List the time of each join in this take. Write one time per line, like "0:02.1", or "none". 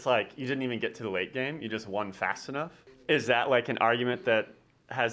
0:02.8